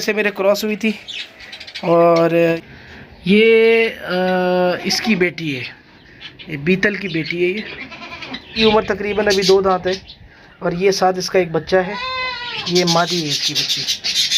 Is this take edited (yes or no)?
yes